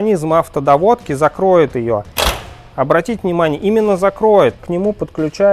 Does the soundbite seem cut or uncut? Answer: cut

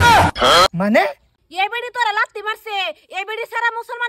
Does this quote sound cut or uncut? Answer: cut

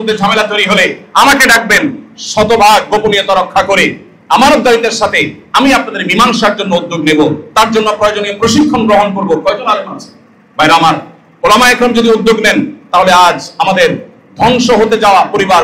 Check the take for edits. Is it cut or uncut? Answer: uncut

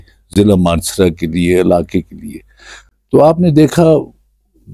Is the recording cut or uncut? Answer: uncut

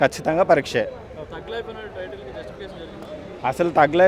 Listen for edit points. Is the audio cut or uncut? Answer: uncut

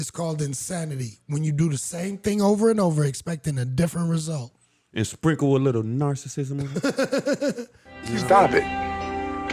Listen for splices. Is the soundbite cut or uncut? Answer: cut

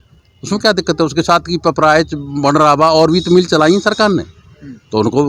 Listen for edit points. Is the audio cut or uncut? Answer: uncut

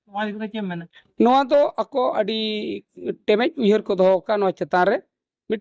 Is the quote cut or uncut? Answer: cut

